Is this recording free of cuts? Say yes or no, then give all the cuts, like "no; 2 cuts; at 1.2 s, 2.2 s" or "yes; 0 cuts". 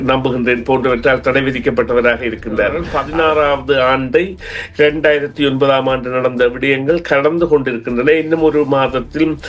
no; 1 cut; at 2.9 s